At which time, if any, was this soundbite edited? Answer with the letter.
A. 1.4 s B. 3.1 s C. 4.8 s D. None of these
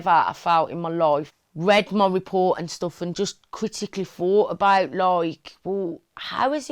A